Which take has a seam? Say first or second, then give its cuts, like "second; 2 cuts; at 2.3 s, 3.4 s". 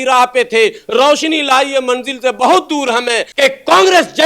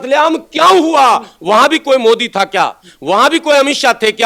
first; 1 cut; at 3.3 s